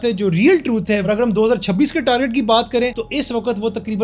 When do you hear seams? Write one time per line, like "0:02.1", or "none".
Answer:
0:01.1